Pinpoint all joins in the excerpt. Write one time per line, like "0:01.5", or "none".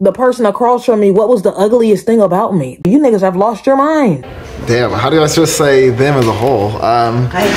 0:02.8
0:04.2